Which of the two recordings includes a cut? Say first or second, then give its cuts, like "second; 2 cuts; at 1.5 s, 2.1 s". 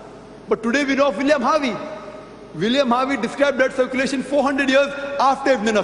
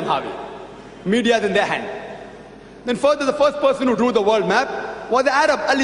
first; 1 cut; at 4.8 s